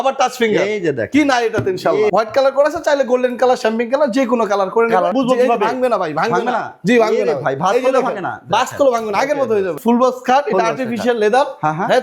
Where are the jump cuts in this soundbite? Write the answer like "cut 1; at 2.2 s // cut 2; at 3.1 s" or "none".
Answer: cut 1; at 2.1 s // cut 2; at 5.1 s // cut 3; at 9.8 s